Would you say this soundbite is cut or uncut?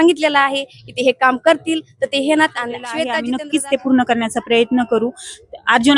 cut